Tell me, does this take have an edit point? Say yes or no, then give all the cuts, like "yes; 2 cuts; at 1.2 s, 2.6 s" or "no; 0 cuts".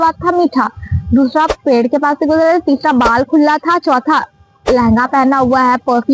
no; 0 cuts